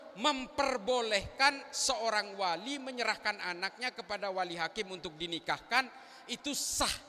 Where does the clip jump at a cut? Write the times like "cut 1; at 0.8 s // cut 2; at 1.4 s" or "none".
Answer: none